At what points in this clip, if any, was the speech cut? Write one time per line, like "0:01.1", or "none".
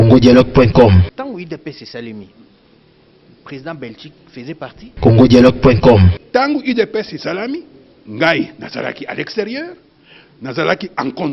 0:01.1
0:04.8
0:06.2